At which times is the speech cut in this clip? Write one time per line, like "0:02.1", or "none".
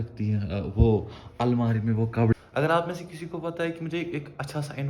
0:02.3

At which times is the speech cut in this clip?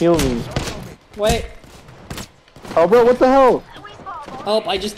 none

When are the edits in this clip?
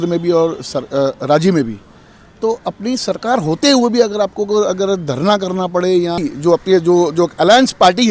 0:06.2

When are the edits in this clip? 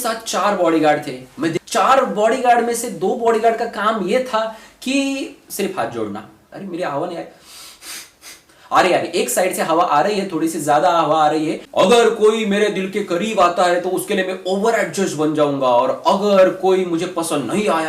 0:01.6
0:06.4
0:11.6

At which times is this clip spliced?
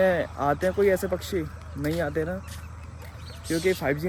none

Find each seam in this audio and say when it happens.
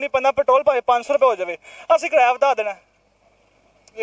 none

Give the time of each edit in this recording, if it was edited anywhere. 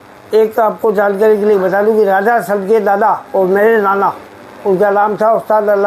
none

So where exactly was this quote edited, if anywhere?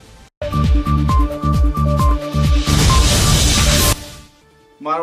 0:04.1

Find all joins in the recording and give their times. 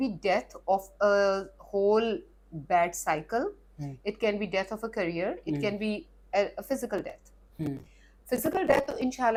none

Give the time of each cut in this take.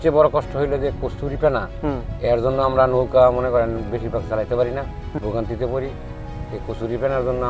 0:05.1

